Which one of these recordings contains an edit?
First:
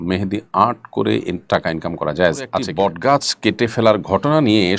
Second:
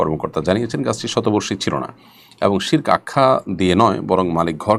first; 1 cut; at 2.5 s

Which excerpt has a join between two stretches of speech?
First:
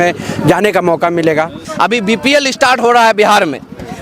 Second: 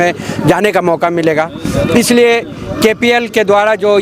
first; 1 cut; at 1.6 s

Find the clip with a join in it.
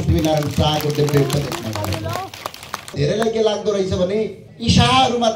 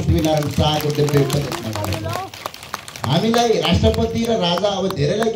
first; 2 cuts; at 2.9 s, 4.5 s

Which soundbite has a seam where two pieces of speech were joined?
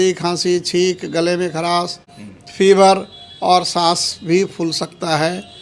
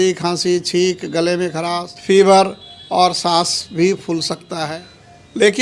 second; 2 cuts; at 1.9 s, 4.7 s

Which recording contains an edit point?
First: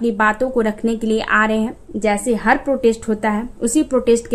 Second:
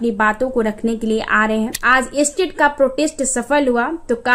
second; 1 cut; at 1.8 s

